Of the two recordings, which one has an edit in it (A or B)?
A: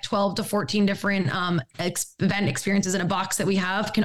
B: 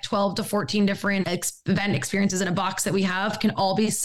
B